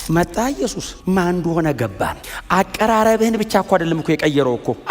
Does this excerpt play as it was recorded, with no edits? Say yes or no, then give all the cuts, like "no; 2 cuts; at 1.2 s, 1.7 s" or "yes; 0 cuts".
no; 2 cuts; at 0.9 s, 2.3 s